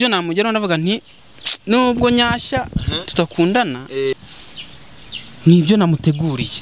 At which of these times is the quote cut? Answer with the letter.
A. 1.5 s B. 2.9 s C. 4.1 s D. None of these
C